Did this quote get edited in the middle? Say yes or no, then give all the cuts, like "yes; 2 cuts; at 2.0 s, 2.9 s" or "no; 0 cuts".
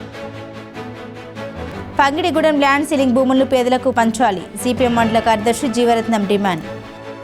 yes; 1 cut; at 1.7 s